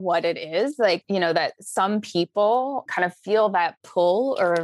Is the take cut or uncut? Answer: cut